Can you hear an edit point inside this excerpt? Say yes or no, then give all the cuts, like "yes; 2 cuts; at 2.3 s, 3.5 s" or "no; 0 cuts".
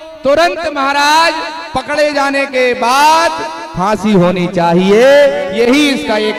no; 0 cuts